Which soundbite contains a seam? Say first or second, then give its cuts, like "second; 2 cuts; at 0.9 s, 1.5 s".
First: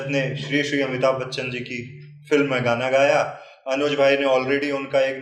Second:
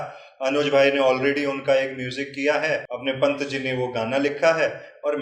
second; 1 cut; at 2.9 s